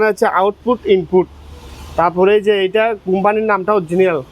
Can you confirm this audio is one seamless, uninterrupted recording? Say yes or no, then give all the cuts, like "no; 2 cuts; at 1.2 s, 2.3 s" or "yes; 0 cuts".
yes; 0 cuts